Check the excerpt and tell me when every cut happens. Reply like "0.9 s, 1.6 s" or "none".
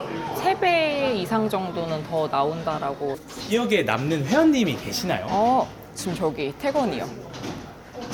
3.2 s